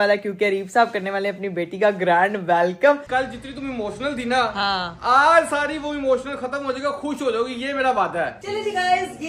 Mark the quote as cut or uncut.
cut